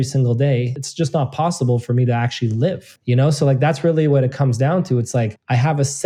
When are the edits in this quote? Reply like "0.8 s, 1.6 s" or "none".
none